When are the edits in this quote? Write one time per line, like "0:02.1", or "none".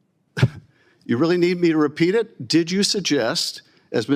none